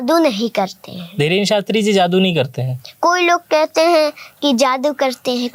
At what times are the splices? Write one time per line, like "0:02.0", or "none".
none